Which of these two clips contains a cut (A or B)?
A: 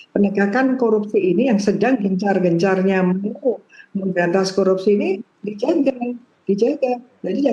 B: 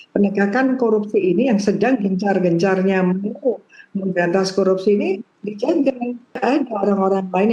B